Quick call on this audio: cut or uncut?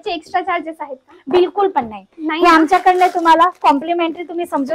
uncut